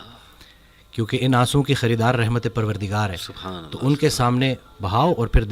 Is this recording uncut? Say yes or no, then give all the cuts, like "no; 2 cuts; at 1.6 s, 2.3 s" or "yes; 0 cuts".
yes; 0 cuts